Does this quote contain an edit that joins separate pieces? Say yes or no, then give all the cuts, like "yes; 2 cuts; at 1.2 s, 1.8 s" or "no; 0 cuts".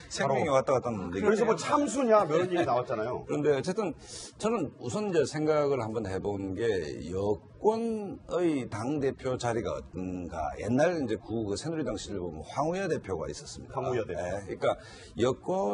no; 0 cuts